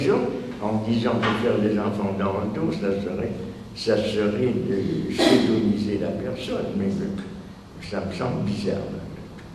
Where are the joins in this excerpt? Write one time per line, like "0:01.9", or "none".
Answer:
0:05.9